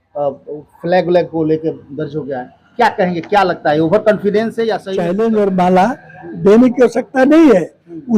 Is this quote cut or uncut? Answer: cut